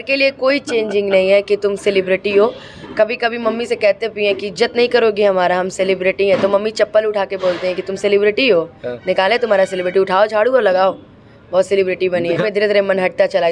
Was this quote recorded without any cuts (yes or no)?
no